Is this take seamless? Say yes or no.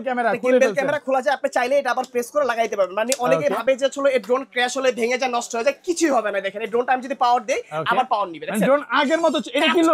yes